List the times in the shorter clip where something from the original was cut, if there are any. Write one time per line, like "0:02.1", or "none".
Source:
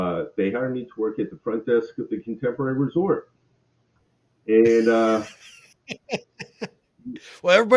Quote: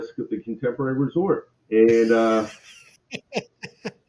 0:01.5